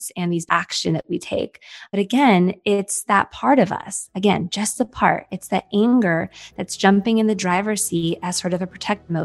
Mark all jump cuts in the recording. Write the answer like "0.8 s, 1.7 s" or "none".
1.9 s